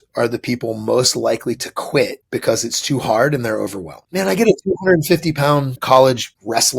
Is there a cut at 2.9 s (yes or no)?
no